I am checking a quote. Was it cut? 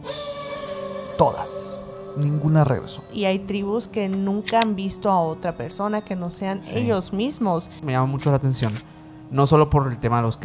yes; 2 cuts; at 3.1 s, 7.8 s

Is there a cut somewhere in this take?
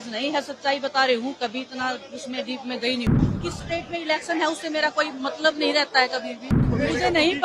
yes; 2 cuts; at 3.1 s, 6.6 s

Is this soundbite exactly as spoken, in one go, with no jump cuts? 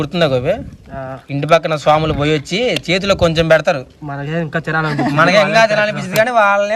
yes; 0 cuts

